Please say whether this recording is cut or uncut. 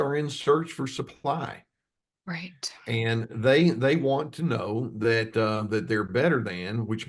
uncut